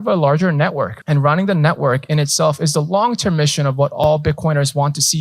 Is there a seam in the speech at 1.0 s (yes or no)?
yes